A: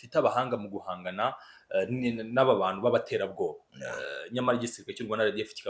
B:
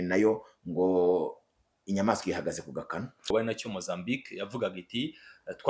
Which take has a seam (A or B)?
B